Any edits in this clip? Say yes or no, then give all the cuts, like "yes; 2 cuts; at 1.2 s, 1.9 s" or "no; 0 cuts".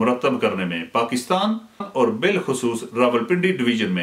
no; 0 cuts